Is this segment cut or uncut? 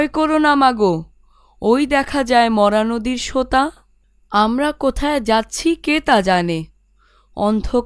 cut